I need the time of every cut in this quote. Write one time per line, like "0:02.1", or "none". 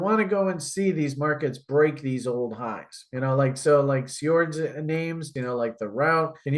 0:05.3